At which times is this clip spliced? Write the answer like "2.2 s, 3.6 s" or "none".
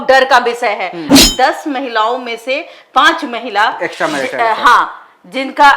1.1 s